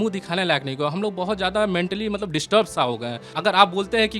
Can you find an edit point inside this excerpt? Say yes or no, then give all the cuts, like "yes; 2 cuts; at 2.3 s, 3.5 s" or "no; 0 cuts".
yes; 1 cut; at 3.2 s